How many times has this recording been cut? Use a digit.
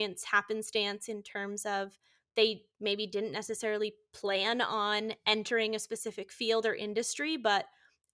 0